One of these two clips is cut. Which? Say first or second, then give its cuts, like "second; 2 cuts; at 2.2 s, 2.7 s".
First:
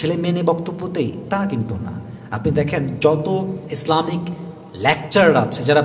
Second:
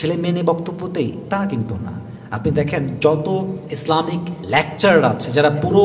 second; 1 cut; at 4.3 s